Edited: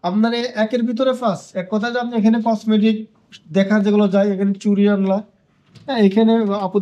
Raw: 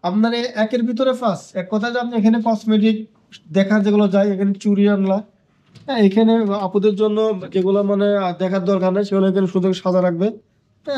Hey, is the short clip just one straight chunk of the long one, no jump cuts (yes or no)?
yes